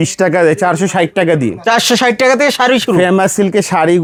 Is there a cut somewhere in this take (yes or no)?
no